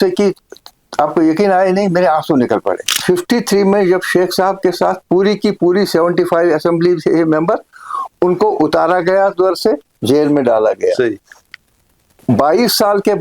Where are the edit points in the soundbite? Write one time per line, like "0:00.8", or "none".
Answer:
0:02.9